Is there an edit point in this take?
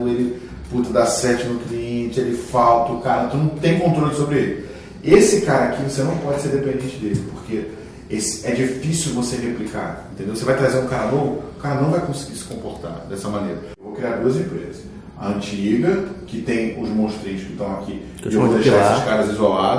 yes; 1 cut; at 13.9 s

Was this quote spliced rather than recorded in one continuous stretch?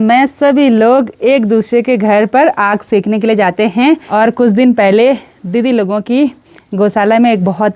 yes; 1 cut; at 4.0 s

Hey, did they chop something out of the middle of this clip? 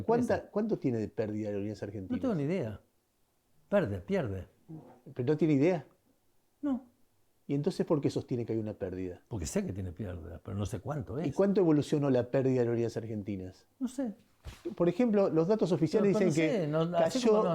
no; 0 cuts

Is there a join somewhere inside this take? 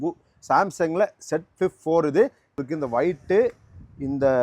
yes; 1 cut; at 2.6 s

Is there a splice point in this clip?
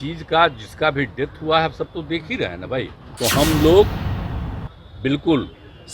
yes; 1 cut; at 3.0 s

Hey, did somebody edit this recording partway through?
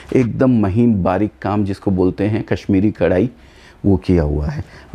no; 0 cuts

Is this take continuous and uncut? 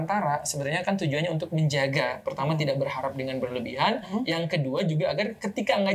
yes; 0 cuts

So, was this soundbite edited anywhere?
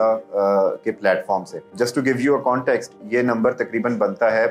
yes; 1 cut; at 1.6 s

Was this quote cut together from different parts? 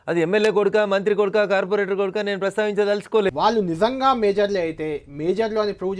yes; 1 cut; at 3.3 s

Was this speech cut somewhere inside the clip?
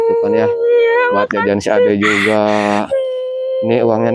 no; 0 cuts

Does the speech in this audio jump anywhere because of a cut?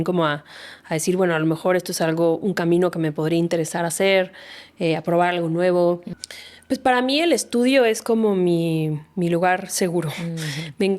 yes; 1 cut; at 6.1 s

